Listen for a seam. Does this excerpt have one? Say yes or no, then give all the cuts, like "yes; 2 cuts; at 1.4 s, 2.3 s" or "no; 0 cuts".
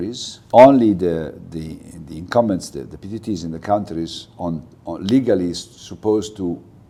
no; 0 cuts